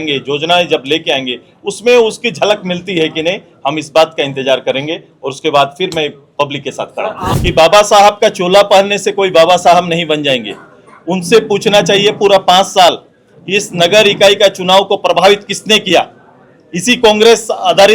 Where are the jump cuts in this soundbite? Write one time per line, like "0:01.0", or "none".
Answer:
0:07.3